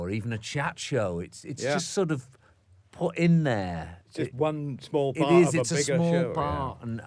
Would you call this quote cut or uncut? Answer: uncut